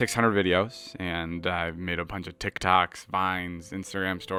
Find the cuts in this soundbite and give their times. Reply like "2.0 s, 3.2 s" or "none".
none